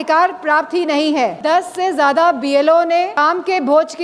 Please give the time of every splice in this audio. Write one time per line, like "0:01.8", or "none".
0:01.4
0:03.2